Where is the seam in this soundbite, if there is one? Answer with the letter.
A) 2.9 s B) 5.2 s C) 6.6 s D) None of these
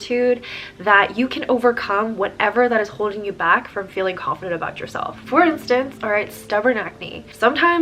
D